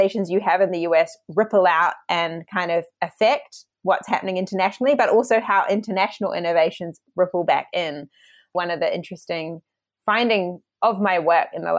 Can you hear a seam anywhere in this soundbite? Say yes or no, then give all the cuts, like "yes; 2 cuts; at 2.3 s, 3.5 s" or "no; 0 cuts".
yes; 2 cuts; at 8.5 s, 10.6 s